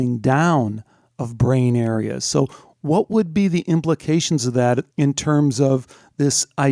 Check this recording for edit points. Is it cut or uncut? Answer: cut